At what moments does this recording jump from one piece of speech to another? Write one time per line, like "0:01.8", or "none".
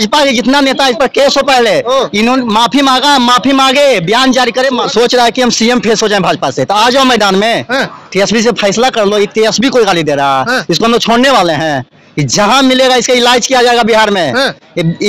0:04.9